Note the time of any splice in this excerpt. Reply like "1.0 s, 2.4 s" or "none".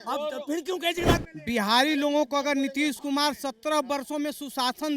1.2 s